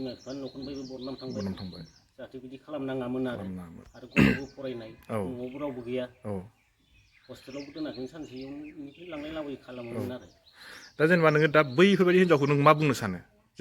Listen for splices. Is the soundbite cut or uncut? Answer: uncut